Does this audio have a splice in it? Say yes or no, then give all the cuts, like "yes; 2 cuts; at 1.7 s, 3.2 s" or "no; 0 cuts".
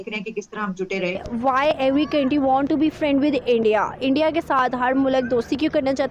yes; 1 cut; at 1.2 s